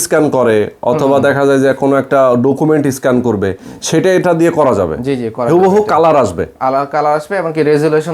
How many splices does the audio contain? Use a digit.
0